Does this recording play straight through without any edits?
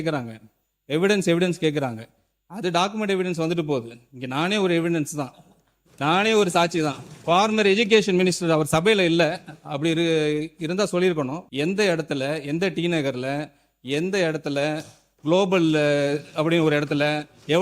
no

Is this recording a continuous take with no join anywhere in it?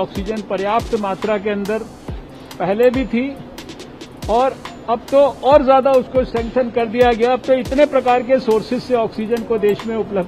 yes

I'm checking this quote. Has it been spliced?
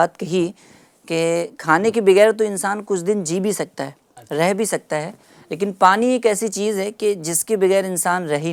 no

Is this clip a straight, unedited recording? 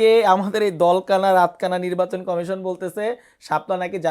yes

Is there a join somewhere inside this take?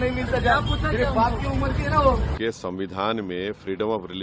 yes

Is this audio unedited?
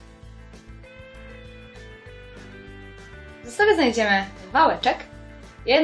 no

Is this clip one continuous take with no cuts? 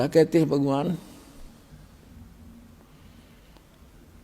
no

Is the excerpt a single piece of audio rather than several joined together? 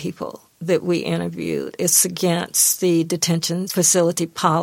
no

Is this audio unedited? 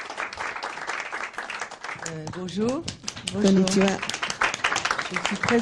no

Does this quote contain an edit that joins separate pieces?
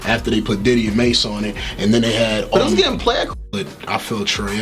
yes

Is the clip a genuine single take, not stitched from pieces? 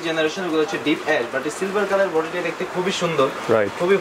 yes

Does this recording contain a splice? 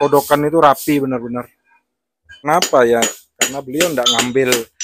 yes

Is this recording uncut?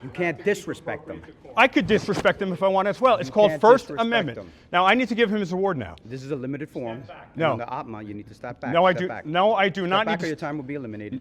yes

